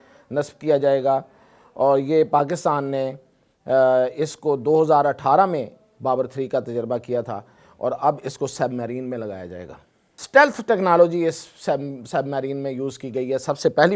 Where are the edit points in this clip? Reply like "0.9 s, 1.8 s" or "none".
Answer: 10.1 s